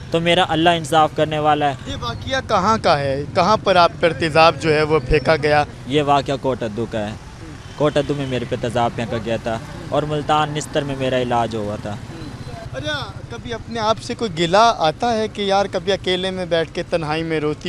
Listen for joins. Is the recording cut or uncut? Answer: uncut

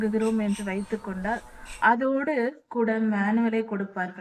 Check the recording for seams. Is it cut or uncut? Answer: uncut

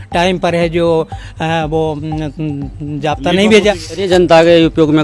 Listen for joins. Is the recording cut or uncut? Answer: cut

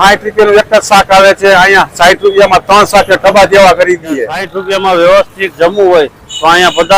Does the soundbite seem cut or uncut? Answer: cut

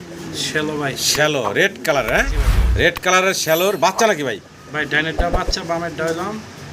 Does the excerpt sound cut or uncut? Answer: uncut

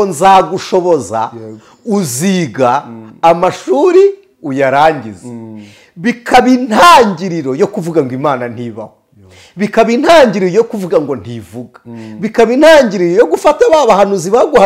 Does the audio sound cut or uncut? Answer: uncut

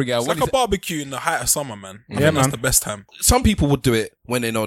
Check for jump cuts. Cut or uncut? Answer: cut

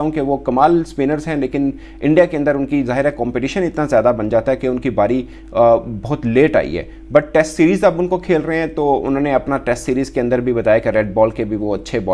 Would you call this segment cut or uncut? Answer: uncut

